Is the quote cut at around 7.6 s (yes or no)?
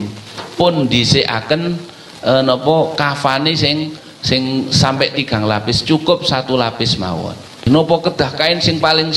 yes